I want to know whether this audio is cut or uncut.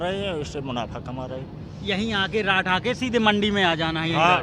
uncut